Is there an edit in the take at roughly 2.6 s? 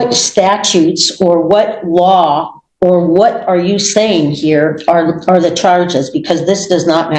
no; 0 cuts

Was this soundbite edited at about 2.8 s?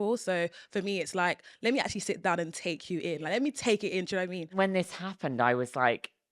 no; 1 cut; at 4.5 s

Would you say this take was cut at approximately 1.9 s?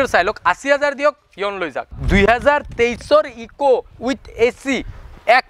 yes; 1 cut; at 1.9 s

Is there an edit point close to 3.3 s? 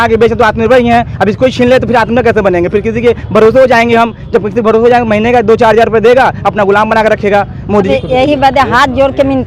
no; 1 cut; at 7.9 s

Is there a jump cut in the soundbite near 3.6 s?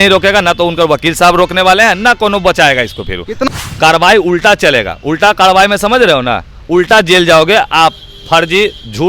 yes; 1 cut; at 3.6 s

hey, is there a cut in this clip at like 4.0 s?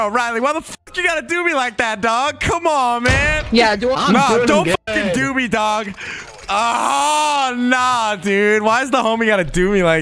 yes; 1 cut; at 4.0 s

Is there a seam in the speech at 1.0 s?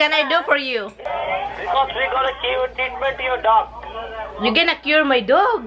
yes; 1 cut; at 1.0 s

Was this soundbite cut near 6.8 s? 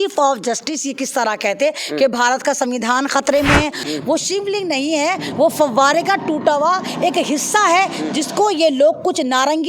no; 1 cut; at 3.9 s

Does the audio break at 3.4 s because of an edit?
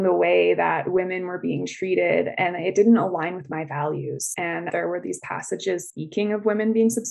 no; 1 cut; at 4.7 s

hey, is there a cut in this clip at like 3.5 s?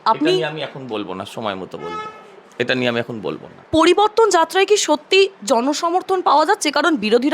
yes; 1 cut; at 3.5 s

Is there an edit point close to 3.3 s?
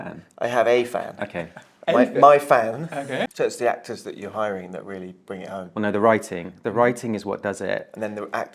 yes; 1 cut; at 3.3 s

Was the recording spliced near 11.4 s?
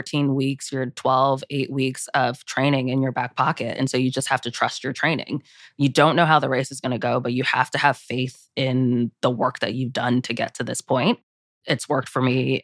yes; 1 cut; at 11.4 s

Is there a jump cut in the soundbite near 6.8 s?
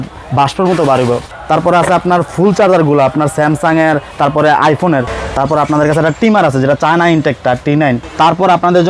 no; 3 cuts; at 1.3 s, 5.2 s, 8.1 s

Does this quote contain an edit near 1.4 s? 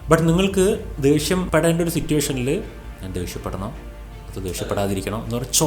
yes; 1 cut; at 1.4 s

